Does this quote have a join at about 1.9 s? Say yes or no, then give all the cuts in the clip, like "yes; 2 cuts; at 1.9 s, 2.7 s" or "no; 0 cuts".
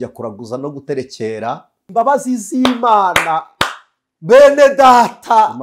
yes; 1 cut; at 1.9 s